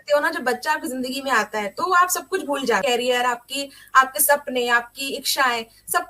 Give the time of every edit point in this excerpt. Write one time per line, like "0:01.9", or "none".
0:02.9